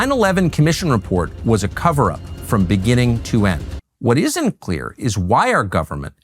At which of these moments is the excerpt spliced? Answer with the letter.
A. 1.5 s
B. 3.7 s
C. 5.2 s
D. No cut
B